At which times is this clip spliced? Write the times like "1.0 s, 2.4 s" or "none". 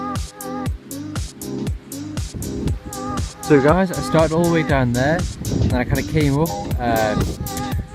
4.5 s